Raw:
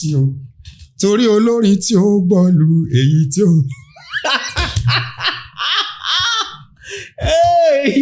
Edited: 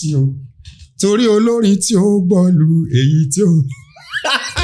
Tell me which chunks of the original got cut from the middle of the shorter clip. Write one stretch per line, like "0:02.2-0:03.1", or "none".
none